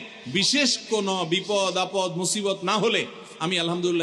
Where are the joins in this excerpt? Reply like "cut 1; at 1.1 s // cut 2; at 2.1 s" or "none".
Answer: none